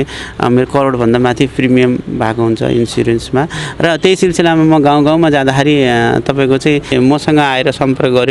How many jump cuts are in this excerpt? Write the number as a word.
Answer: one